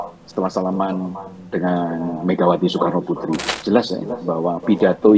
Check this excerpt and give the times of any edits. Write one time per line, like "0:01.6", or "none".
0:03.5